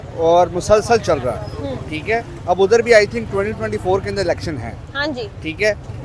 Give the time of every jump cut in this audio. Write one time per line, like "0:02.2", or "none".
none